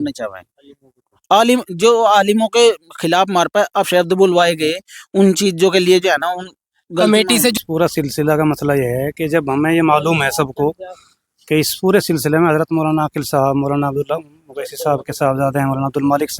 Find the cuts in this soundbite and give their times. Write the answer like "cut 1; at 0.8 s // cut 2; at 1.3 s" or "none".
cut 1; at 7.6 s